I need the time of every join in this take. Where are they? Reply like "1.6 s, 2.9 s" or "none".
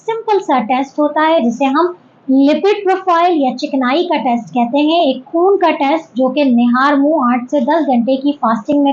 none